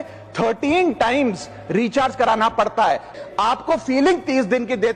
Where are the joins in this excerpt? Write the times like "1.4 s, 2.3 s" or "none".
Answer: 3.1 s